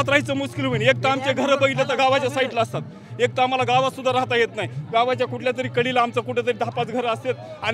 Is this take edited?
no; 0 cuts

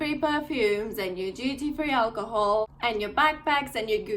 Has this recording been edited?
yes; 1 cut; at 2.7 s

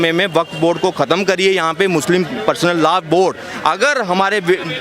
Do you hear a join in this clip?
no; 0 cuts

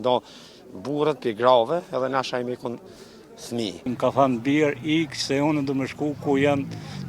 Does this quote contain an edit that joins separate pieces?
yes; 1 cut; at 3.9 s

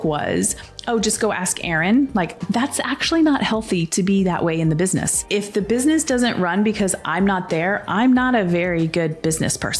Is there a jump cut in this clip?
yes; 2 cuts; at 2.4 s, 5.2 s

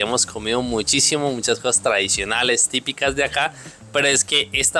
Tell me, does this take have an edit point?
no; 0 cuts

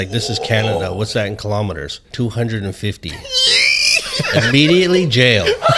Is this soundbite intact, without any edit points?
no; 1 cut; at 2.1 s

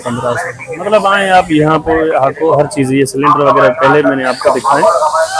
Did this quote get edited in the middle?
no; 0 cuts

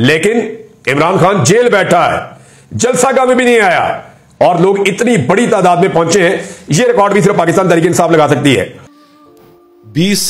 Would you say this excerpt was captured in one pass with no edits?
no; 1 cut; at 9.1 s

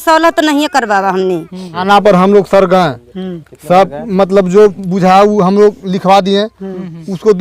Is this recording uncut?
no; 1 cut; at 1.8 s

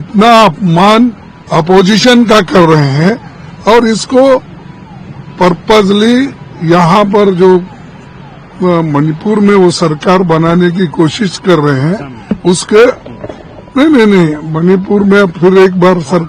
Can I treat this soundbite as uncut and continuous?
yes; 0 cuts

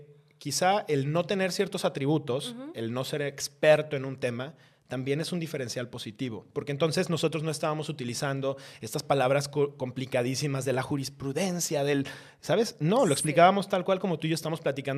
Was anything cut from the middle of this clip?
no; 0 cuts

